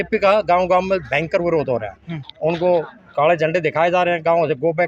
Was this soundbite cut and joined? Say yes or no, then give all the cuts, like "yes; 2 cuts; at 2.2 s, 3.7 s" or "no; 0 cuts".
no; 0 cuts